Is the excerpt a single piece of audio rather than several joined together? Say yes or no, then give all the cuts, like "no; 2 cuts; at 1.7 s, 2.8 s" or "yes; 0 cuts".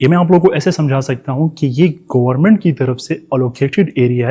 yes; 0 cuts